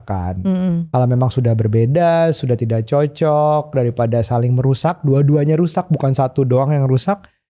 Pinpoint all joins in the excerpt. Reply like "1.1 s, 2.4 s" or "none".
none